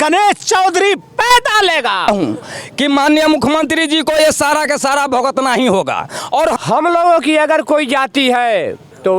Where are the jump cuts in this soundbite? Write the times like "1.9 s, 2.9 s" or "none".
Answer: 2.1 s, 6.6 s